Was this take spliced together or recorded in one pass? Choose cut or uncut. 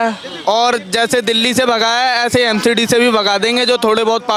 uncut